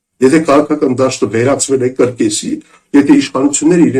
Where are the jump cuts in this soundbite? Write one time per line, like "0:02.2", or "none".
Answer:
none

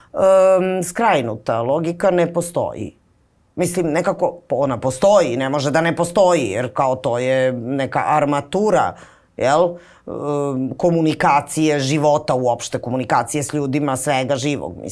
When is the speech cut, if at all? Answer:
none

